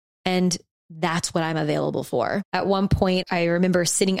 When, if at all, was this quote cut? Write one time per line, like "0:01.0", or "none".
0:02.5
0:03.2